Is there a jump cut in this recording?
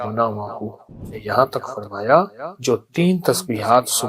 yes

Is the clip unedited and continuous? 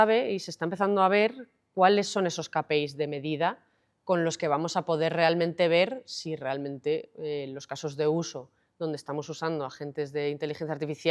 yes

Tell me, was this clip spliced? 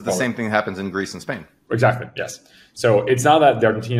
no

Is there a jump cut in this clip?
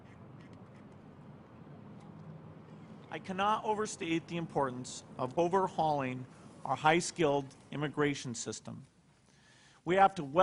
no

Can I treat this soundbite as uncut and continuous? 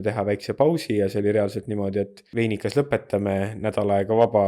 no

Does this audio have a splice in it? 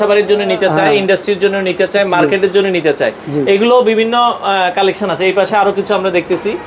no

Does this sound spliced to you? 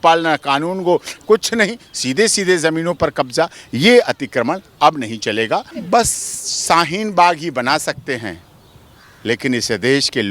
yes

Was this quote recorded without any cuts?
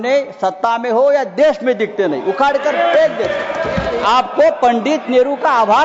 no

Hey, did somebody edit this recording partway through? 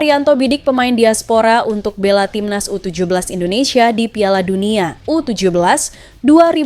no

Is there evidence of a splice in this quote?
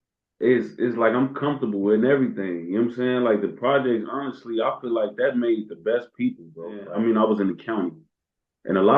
yes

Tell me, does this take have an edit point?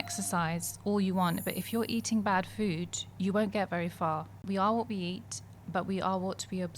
yes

